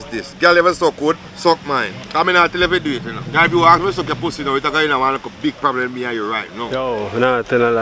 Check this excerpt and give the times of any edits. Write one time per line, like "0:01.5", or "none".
0:01.3
0:02.0
0:03.2
0:06.7